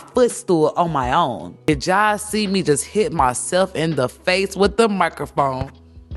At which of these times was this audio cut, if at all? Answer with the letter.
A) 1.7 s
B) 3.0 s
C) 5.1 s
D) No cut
A